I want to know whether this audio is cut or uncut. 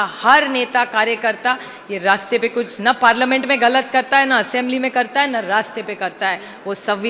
uncut